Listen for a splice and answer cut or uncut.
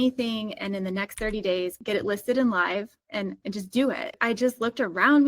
cut